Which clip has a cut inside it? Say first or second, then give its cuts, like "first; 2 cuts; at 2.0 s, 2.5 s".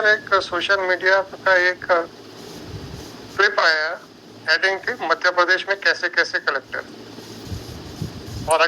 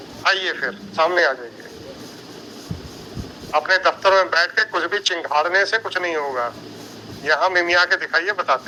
first; 1 cut; at 7.5 s